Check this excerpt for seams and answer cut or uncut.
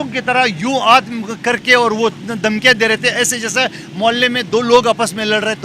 uncut